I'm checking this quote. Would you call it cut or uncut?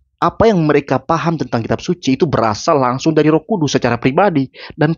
uncut